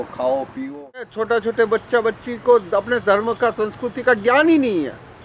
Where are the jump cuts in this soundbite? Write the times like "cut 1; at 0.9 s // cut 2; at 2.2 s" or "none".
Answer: cut 1; at 1.2 s